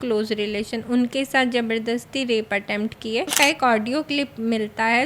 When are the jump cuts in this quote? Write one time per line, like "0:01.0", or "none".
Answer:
0:03.3